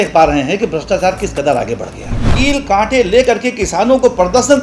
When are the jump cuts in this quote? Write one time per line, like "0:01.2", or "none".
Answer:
0:02.3